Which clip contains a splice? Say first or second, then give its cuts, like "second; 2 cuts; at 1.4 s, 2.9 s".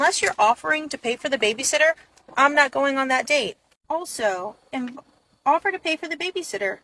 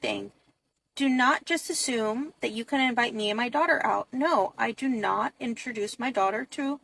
first; 1 cut; at 5.0 s